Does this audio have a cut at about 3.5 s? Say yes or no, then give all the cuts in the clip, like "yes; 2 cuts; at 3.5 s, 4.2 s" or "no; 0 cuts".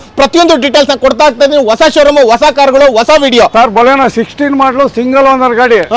yes; 1 cut; at 3.5 s